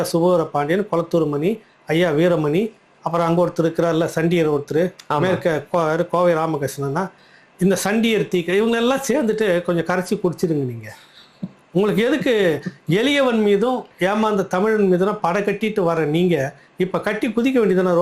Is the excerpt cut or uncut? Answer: uncut